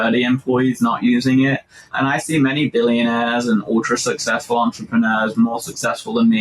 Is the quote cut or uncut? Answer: cut